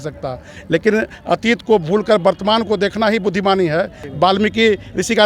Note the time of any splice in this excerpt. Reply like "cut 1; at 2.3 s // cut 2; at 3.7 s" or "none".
cut 1; at 4.0 s